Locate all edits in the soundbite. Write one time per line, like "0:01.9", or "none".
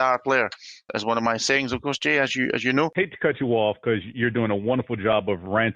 0:00.8
0:02.9